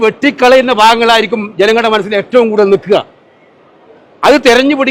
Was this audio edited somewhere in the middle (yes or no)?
no